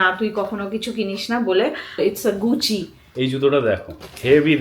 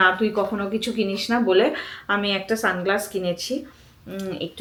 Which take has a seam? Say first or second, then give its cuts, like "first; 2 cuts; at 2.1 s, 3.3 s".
first; 2 cuts; at 2.0 s, 3.0 s